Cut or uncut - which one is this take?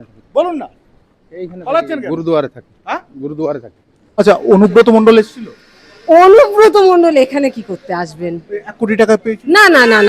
cut